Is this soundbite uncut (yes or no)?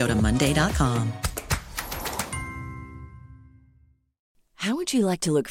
yes